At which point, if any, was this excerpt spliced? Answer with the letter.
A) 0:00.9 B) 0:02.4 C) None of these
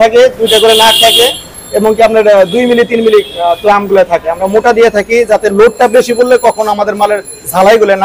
C